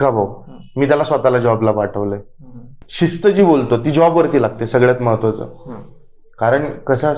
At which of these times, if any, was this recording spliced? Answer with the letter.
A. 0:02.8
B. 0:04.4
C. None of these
A